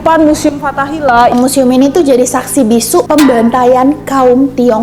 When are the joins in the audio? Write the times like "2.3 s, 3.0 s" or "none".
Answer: 1.3 s